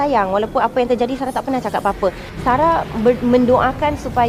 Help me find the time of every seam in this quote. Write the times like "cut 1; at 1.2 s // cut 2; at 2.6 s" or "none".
cut 1; at 2.2 s